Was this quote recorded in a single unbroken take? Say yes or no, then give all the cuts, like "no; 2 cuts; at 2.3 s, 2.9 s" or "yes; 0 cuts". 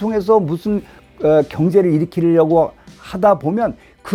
yes; 0 cuts